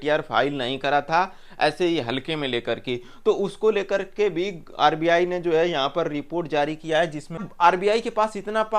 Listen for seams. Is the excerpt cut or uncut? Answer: cut